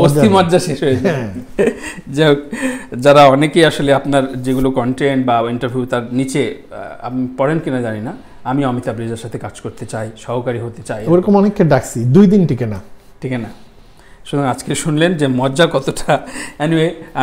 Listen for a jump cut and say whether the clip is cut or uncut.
uncut